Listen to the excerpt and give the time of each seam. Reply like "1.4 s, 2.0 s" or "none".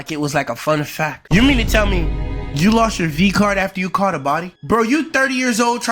1.2 s